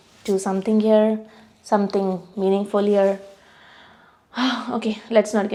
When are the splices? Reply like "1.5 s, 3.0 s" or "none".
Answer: none